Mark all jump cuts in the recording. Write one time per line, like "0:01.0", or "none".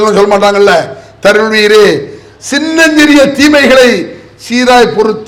none